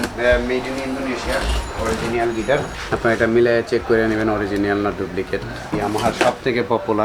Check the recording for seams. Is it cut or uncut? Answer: cut